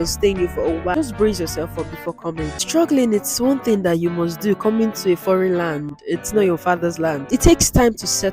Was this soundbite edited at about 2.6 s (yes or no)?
yes